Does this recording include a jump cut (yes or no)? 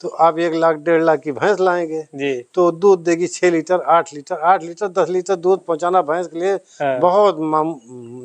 no